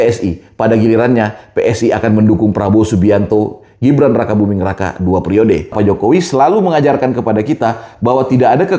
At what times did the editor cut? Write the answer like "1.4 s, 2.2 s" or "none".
5.7 s